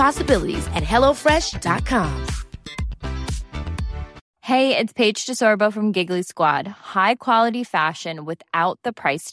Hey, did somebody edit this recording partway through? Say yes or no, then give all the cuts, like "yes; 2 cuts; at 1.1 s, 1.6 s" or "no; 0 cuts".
no; 0 cuts